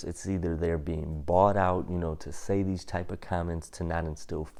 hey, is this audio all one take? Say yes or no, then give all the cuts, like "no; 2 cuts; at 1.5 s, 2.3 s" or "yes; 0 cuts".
yes; 0 cuts